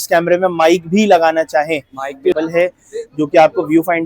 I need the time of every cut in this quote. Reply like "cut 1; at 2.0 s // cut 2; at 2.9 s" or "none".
cut 1; at 2.3 s